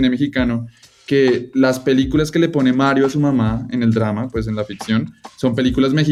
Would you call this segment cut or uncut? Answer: uncut